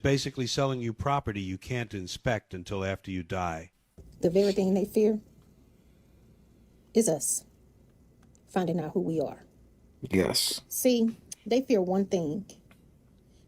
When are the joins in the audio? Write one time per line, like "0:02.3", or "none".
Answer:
0:03.9